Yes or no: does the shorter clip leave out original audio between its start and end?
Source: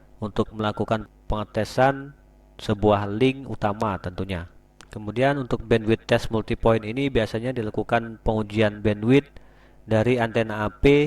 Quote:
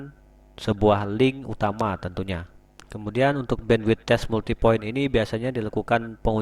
no